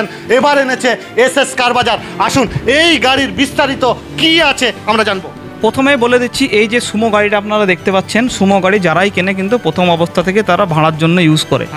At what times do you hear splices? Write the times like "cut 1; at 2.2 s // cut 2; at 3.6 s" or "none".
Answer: none